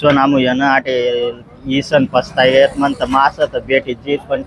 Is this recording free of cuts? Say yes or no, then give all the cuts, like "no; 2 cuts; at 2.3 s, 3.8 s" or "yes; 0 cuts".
yes; 0 cuts